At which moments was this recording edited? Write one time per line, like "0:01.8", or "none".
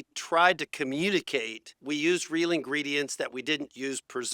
0:01.7